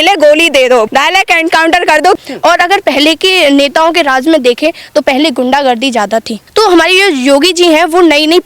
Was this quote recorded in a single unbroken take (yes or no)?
no